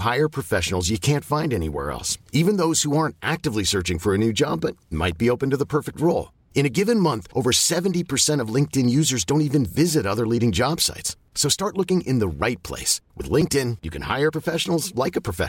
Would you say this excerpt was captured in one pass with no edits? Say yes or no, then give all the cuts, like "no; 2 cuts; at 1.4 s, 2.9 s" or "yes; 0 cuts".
yes; 0 cuts